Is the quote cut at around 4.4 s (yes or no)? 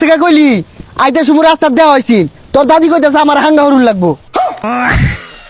yes